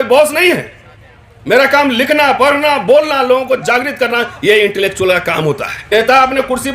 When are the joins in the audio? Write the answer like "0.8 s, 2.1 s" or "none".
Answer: 5.7 s